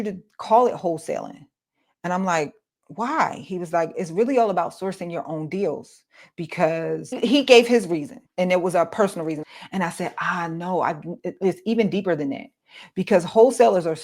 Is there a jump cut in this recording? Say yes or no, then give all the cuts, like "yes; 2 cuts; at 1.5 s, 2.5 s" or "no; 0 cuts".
yes; 3 cuts; at 7.2 s, 8.2 s, 9.4 s